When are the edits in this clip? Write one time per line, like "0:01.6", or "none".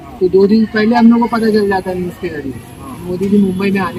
none